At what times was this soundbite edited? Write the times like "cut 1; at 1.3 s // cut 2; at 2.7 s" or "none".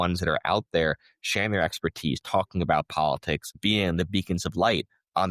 cut 1; at 3.6 s